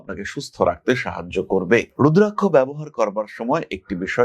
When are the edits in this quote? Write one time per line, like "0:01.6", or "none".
0:01.9